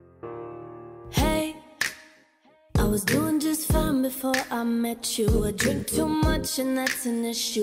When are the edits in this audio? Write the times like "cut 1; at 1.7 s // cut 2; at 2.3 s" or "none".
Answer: cut 1; at 1.0 s